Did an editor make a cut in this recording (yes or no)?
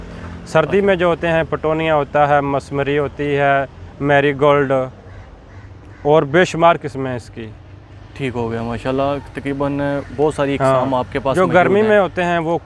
no